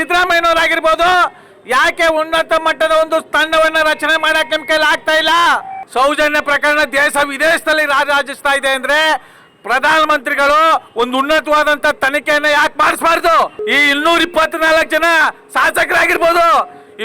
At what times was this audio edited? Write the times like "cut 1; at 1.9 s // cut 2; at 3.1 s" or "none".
cut 1; at 5.8 s // cut 2; at 13.6 s